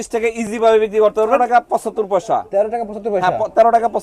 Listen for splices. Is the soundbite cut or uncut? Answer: cut